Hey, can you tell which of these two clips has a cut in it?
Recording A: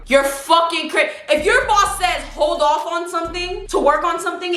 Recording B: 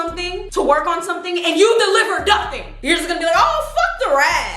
B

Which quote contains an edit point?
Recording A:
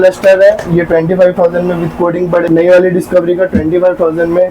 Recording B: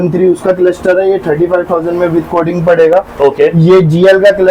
A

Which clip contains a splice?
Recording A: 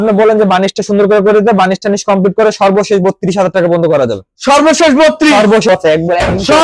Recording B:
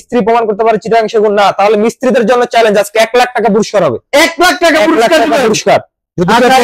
A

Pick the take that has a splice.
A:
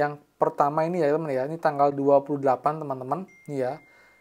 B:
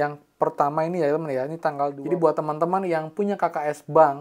B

